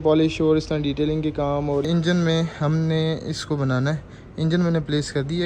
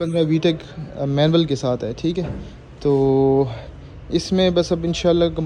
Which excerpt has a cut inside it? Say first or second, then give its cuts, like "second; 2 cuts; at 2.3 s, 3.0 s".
first; 1 cut; at 1.9 s